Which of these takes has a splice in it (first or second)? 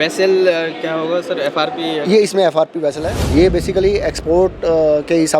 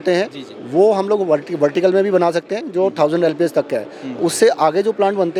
first